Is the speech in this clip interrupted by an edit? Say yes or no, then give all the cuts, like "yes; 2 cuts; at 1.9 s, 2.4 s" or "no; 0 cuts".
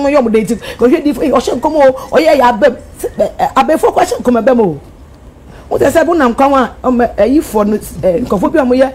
no; 0 cuts